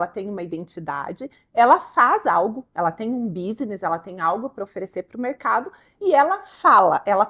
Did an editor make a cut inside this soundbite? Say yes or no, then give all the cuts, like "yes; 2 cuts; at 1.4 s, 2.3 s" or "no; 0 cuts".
no; 0 cuts